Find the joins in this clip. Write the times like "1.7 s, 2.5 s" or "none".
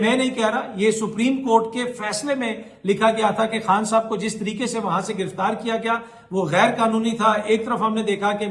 none

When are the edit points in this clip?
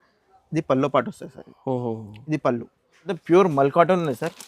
3.1 s

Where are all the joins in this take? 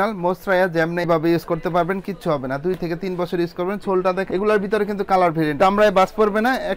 5.5 s

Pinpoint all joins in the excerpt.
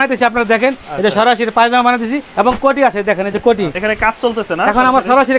2.3 s, 3.8 s

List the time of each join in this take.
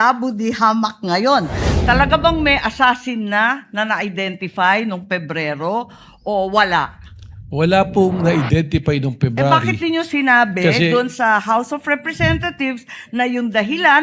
1.7 s

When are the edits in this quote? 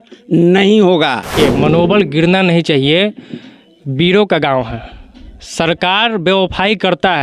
1.3 s

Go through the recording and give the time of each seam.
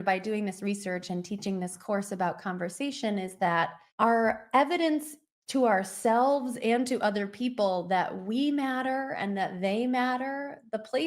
3.8 s

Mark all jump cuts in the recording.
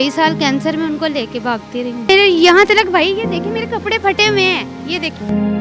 2.1 s

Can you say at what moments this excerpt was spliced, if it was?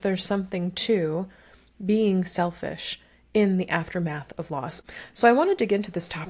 4.8 s

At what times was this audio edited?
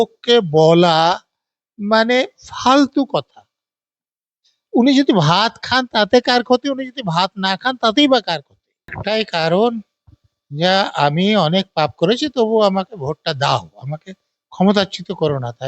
9.0 s

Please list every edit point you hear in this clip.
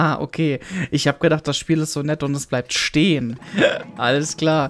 3.4 s

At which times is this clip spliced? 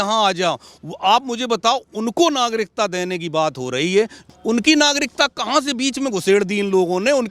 4.2 s

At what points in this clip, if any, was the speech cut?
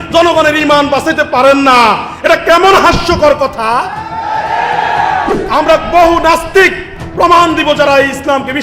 5.3 s

